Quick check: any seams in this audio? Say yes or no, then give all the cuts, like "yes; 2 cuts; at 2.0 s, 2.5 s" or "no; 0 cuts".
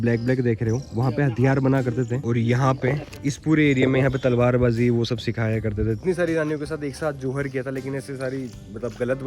yes; 2 cuts; at 2.2 s, 6.0 s